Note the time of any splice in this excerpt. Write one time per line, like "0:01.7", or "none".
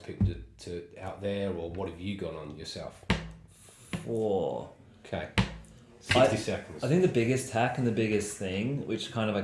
none